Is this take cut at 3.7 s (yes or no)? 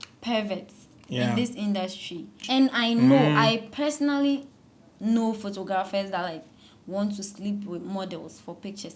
no